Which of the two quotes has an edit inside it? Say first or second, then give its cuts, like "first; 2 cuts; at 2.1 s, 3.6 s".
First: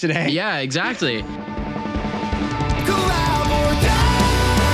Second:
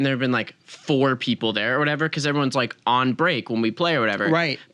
first; 1 cut; at 1.3 s